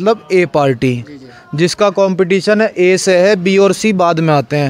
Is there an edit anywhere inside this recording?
no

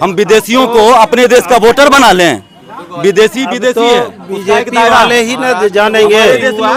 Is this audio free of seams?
yes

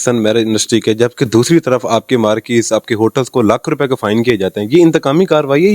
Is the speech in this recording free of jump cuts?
yes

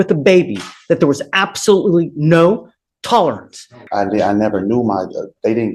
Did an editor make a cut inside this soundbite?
yes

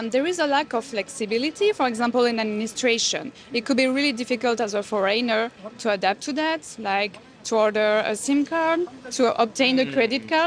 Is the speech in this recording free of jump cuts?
yes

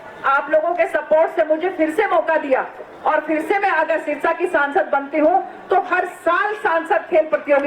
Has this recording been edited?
no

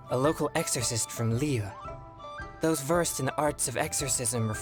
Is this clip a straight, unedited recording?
yes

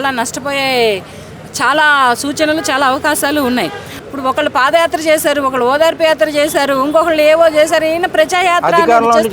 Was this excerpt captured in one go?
no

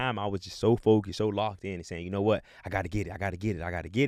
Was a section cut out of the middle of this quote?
no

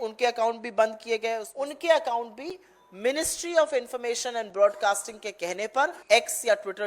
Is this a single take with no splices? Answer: no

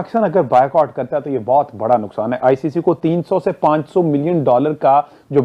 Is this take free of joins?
yes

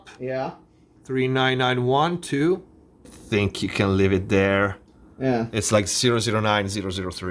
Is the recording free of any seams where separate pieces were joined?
yes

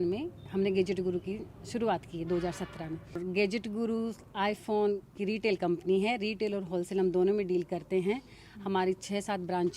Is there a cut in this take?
no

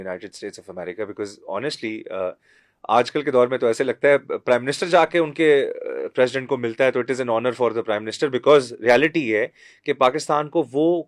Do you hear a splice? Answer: no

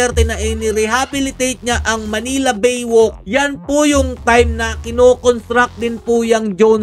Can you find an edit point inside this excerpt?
no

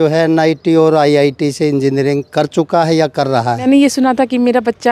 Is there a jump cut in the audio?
yes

